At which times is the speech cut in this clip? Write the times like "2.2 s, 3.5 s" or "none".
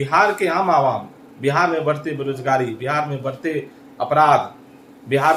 none